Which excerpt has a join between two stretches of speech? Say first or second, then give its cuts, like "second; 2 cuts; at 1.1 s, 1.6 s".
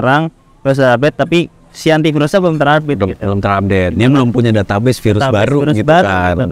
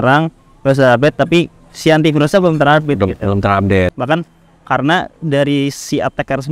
second; 1 cut; at 3.9 s